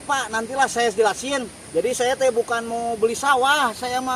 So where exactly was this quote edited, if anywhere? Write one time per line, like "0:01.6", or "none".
0:01.6